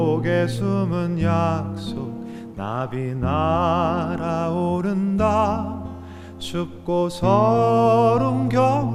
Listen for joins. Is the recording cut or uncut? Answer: uncut